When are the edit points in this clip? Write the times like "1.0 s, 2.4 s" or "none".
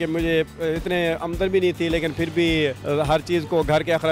2.8 s

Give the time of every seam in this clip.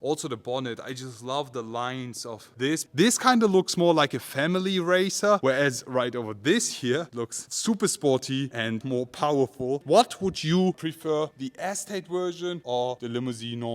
2.9 s, 8.8 s, 9.8 s

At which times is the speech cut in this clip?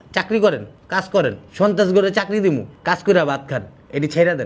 2.4 s

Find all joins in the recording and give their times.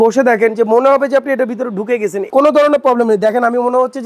2.2 s

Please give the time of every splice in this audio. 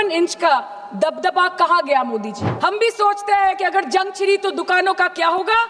2.4 s

